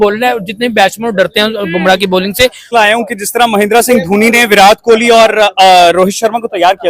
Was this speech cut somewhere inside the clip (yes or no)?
yes